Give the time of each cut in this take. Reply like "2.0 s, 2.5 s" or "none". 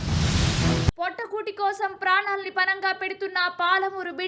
none